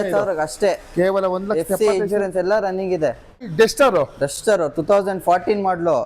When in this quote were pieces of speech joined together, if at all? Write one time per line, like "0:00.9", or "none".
0:03.4